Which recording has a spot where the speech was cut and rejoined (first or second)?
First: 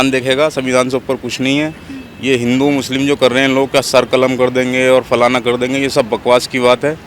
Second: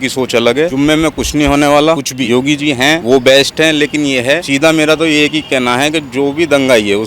second